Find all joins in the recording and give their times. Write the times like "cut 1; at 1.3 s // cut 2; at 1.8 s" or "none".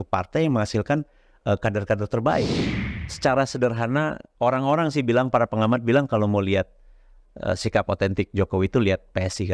cut 1; at 2.7 s

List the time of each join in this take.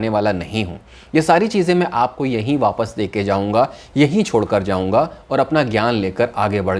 none

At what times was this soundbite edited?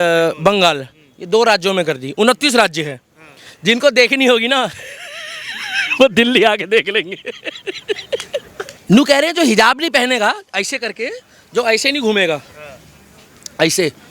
cut 1; at 8.8 s

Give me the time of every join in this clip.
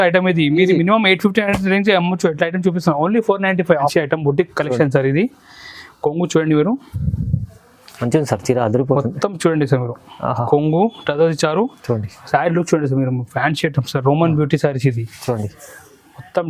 cut 1; at 3.9 s

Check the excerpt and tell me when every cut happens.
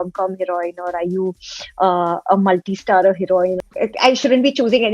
cut 1; at 3.6 s

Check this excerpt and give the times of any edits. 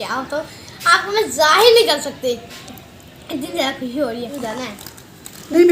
cut 1; at 4.3 s

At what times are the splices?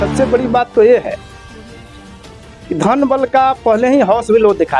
cut 1; at 1.2 s // cut 2; at 2.7 s

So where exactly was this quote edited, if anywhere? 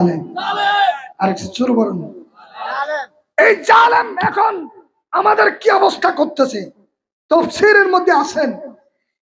none

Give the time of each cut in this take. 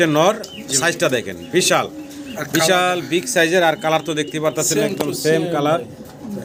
none

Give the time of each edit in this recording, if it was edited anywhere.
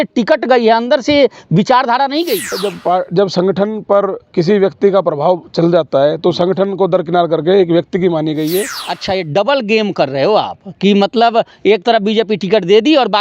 cut 1; at 2.6 s // cut 2; at 8.8 s

